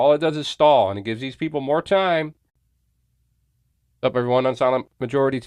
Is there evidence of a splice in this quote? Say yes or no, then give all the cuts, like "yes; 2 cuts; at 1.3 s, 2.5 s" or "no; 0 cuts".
no; 0 cuts